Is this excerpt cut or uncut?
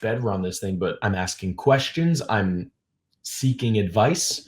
cut